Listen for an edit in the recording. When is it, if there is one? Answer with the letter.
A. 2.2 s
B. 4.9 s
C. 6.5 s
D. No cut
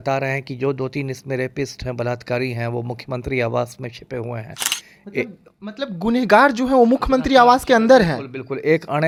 D